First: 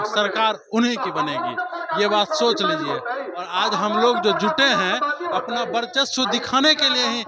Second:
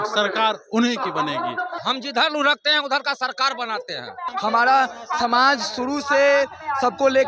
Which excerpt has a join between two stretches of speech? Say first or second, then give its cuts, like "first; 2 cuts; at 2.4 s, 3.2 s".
second; 2 cuts; at 1.8 s, 4.2 s